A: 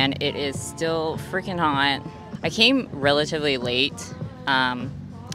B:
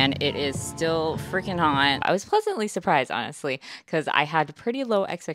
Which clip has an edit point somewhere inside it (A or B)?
B